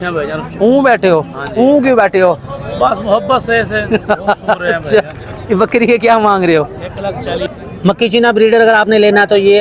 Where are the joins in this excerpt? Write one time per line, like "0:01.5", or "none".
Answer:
0:07.5